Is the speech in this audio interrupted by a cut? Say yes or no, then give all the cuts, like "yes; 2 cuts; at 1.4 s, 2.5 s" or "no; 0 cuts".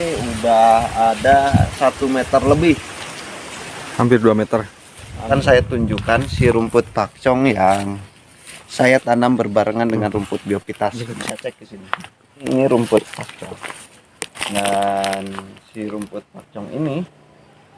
yes; 2 cuts; at 5.3 s, 12.4 s